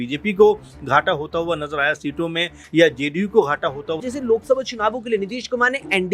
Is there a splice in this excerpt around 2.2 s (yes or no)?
no